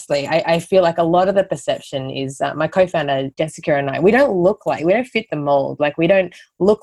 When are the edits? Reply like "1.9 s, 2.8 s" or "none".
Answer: 3.3 s